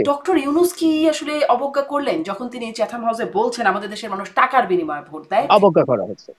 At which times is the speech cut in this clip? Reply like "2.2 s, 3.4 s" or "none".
5.5 s